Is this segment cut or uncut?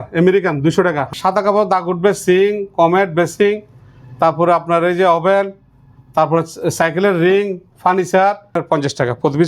cut